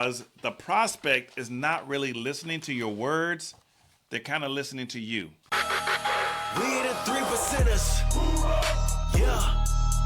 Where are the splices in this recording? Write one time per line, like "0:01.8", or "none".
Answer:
0:05.8

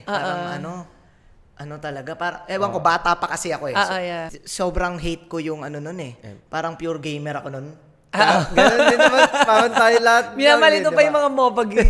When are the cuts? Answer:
0:04.4

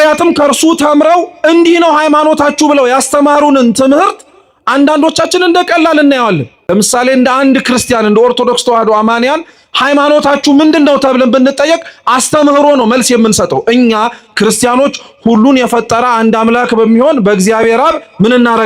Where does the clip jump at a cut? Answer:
0:06.5

